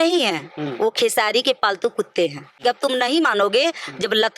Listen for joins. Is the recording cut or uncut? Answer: cut